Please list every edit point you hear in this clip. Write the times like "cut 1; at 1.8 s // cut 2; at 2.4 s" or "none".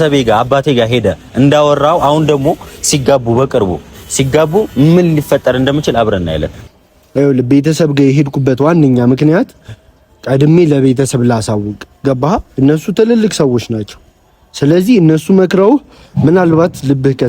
cut 1; at 6.6 s